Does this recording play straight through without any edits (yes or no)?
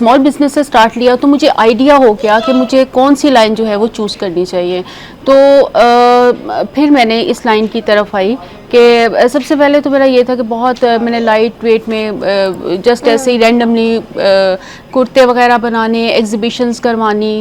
yes